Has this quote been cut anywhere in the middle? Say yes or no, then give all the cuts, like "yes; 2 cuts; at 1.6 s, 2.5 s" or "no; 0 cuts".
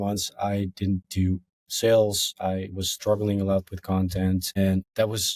yes; 2 cuts; at 1.6 s, 4.6 s